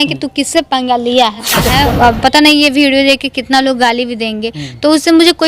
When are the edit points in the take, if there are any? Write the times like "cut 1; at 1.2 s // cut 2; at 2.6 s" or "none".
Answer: cut 1; at 1.7 s

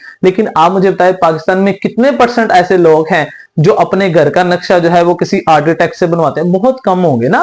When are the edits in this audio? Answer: none

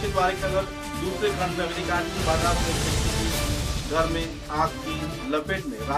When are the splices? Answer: none

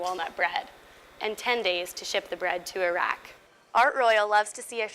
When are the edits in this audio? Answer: cut 1; at 3.3 s

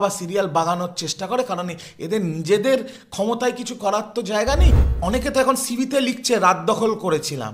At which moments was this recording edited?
cut 1; at 4.8 s

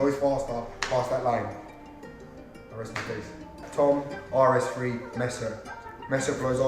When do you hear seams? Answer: cut 1; at 3.6 s

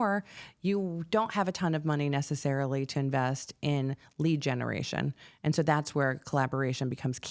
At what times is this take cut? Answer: none

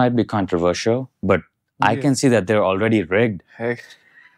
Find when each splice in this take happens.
cut 1; at 1.1 s

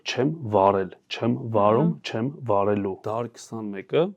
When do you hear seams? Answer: cut 1; at 3.0 s

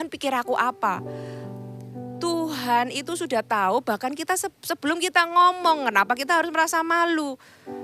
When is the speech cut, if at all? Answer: none

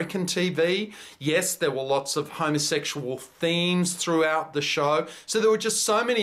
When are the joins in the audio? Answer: none

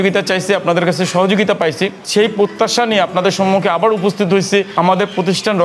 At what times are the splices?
cut 1; at 2.0 s // cut 2; at 4.7 s

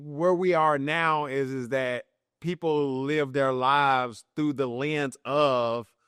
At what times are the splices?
none

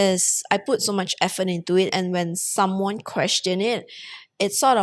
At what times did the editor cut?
cut 1; at 1.9 s

